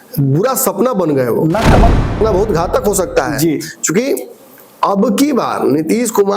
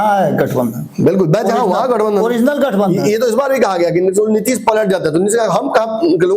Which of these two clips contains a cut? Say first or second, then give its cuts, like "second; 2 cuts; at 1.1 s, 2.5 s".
first; 1 cut; at 2.0 s